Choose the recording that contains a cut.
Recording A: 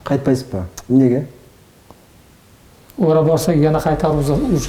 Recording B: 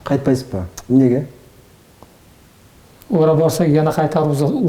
A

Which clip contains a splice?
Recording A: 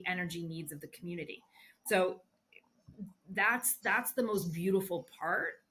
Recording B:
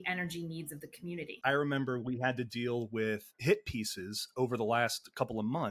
B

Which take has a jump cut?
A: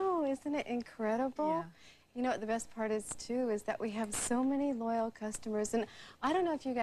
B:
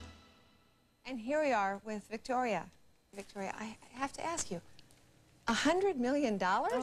A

